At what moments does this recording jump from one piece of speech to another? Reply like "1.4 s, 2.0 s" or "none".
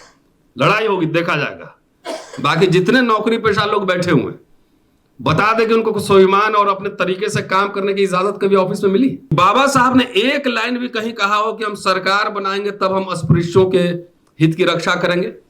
9.3 s